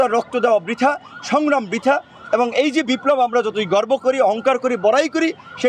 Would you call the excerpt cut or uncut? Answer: uncut